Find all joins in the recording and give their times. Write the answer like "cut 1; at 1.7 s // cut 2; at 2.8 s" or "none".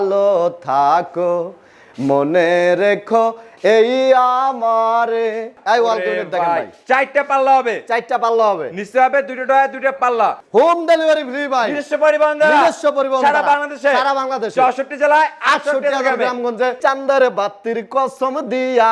cut 1; at 5.6 s // cut 2; at 10.4 s // cut 3; at 16.8 s